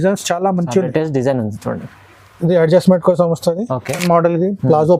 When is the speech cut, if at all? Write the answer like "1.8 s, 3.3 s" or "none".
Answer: 4.0 s